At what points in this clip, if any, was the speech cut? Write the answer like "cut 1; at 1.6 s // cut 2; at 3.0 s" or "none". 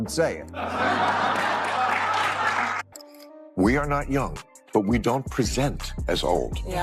cut 1; at 2.8 s